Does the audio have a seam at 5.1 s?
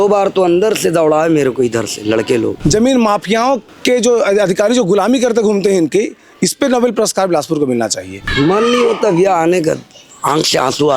no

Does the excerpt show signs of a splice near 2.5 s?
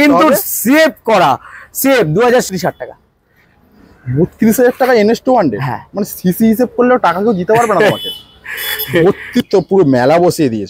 yes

